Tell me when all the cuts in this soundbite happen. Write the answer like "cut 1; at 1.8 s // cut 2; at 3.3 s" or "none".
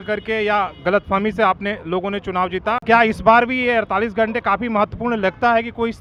none

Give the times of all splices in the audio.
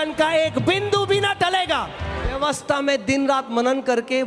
cut 1; at 2.4 s

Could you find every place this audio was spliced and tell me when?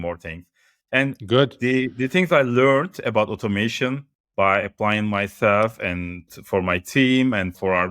cut 1; at 6.2 s

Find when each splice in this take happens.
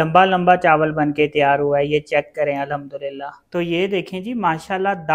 cut 1; at 3.4 s

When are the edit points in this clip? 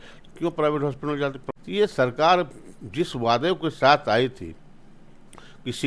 cut 1; at 1.4 s

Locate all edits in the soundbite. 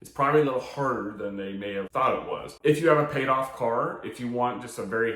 cut 1; at 2.5 s

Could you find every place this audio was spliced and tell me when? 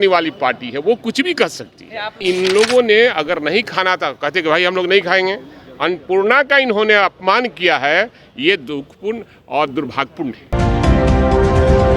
cut 1; at 2.1 s // cut 2; at 10.5 s

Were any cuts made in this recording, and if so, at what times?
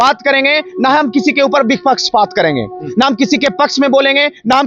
none

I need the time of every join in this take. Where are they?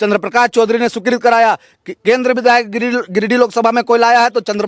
none

